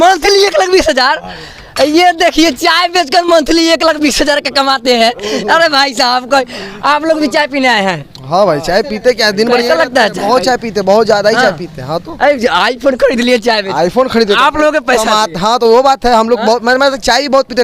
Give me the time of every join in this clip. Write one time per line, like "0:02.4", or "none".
none